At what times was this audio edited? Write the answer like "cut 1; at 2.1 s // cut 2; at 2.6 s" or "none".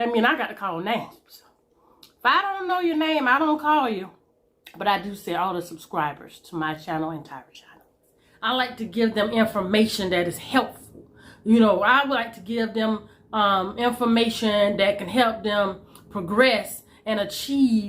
cut 1; at 8.5 s